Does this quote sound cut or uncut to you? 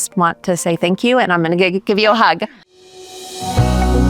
cut